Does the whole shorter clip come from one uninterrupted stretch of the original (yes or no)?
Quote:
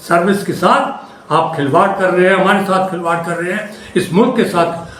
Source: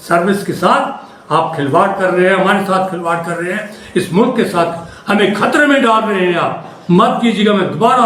yes